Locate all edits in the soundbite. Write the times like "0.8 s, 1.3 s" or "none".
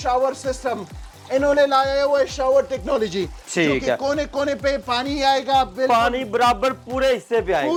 none